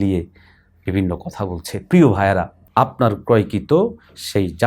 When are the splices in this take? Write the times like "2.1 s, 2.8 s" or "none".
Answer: 2.6 s